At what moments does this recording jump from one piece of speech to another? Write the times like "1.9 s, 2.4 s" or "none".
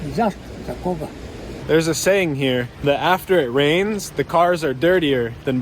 1.5 s, 2.7 s